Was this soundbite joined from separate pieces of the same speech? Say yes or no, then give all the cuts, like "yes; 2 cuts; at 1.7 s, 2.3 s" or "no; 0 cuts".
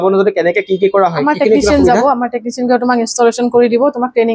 no; 0 cuts